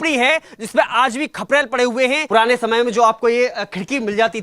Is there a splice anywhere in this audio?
yes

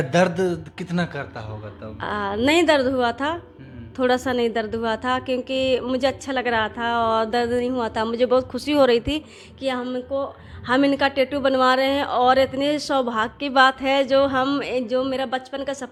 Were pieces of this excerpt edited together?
no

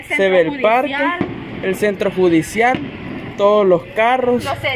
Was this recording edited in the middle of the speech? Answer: no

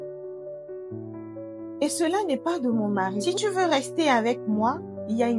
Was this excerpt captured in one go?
no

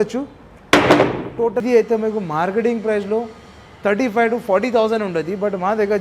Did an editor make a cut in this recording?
yes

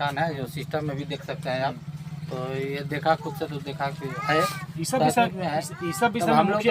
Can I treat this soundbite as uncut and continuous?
yes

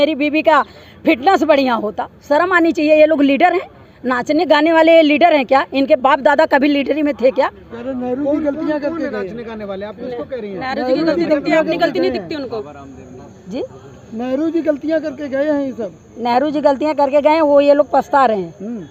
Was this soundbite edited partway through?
no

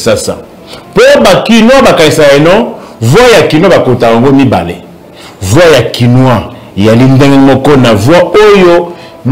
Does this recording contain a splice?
no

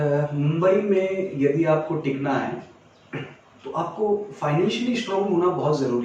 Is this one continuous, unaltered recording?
yes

